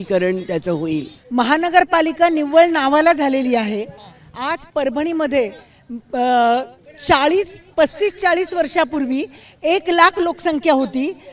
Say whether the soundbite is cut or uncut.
cut